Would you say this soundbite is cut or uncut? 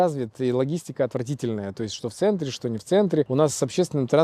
cut